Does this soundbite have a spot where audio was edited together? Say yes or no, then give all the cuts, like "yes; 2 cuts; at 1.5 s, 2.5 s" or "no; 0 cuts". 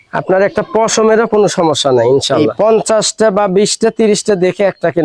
yes; 1 cut; at 2.5 s